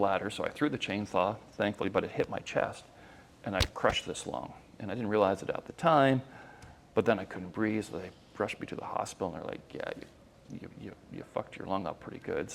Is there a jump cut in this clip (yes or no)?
no